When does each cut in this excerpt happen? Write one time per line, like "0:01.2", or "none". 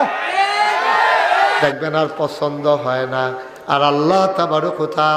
0:01.6